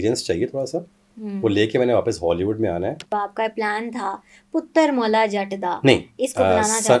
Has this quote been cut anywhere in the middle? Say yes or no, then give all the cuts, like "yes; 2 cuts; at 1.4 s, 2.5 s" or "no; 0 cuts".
yes; 1 cut; at 3.1 s